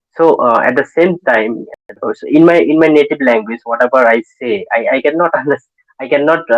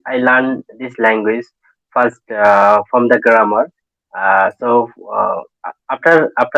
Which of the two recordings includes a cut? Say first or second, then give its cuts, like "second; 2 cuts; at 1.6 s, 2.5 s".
first; 1 cut; at 2.0 s